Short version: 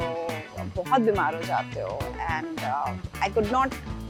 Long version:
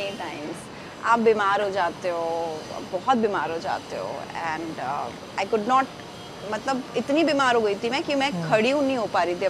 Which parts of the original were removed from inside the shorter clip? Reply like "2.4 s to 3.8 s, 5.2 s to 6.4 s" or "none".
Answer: none